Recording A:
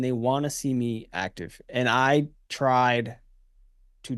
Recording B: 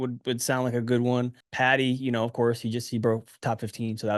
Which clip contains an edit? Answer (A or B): B